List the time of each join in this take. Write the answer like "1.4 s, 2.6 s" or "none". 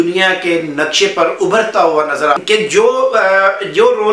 2.4 s